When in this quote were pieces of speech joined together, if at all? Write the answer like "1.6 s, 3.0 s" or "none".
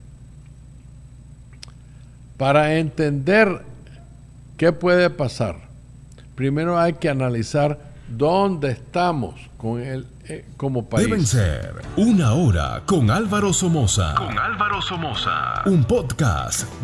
11.0 s